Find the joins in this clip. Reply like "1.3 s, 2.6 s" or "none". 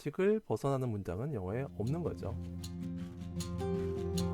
2.4 s